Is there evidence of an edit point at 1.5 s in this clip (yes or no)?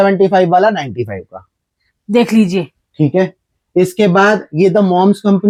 no